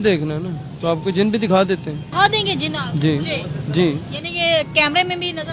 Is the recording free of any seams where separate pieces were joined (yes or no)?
no